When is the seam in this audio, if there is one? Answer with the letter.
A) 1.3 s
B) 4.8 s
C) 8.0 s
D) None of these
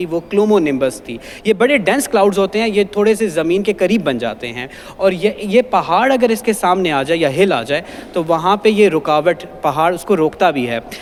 D